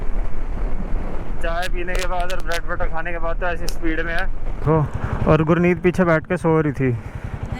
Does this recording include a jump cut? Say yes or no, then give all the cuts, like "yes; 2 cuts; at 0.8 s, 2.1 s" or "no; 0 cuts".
yes; 1 cut; at 4.6 s